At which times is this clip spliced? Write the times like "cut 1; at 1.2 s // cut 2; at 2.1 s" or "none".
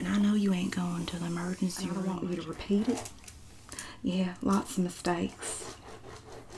cut 1; at 2.1 s

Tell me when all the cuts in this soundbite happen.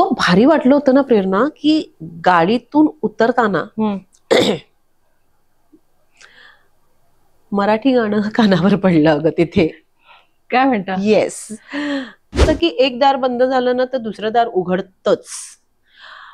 cut 1; at 12.3 s

